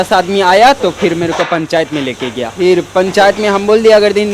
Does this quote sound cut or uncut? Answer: cut